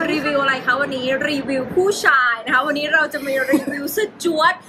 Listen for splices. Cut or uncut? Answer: uncut